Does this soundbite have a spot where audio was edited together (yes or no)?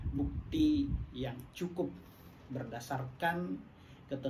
no